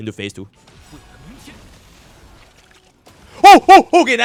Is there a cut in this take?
no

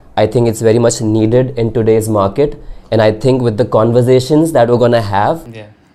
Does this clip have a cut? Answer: no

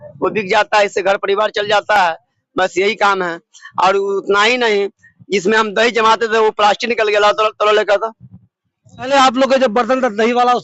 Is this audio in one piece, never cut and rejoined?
yes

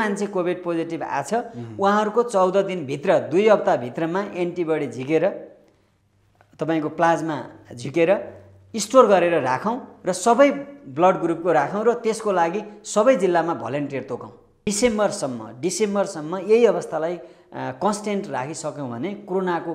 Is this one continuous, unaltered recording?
no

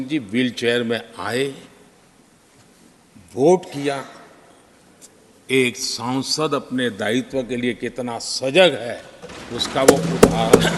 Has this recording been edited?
no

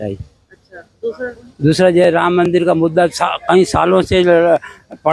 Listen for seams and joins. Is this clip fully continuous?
yes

